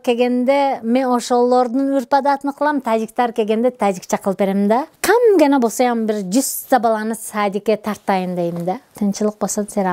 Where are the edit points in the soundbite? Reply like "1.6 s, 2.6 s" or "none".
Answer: 4.9 s, 8.9 s